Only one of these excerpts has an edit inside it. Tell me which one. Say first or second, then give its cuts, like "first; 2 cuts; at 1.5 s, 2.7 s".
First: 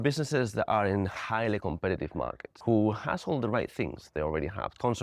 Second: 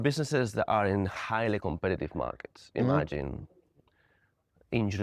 first; 1 cut; at 2.5 s